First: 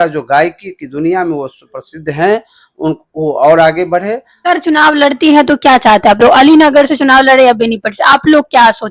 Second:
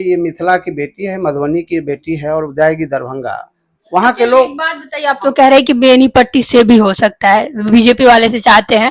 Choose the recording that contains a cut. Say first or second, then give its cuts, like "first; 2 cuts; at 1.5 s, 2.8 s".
first; 1 cut; at 4.3 s